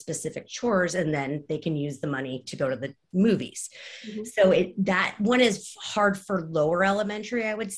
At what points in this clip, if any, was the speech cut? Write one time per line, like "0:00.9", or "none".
none